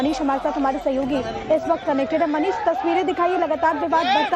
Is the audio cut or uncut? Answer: uncut